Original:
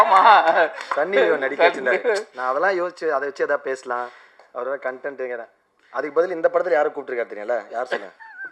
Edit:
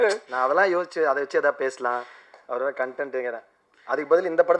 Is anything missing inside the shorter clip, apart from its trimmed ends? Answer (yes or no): no